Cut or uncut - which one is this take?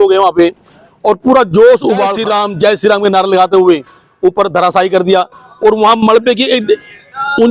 cut